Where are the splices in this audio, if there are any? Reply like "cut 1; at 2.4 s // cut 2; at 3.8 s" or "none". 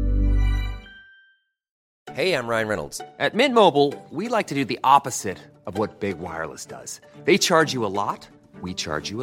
cut 1; at 1.8 s